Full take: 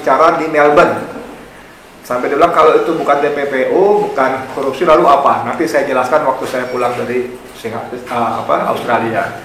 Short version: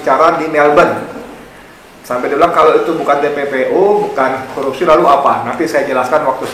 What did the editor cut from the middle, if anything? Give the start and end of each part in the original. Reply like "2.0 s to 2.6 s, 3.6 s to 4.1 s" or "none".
none